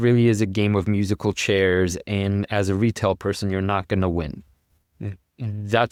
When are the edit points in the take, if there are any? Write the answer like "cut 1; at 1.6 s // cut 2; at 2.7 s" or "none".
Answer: none